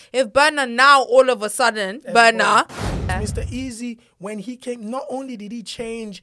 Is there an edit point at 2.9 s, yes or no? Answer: yes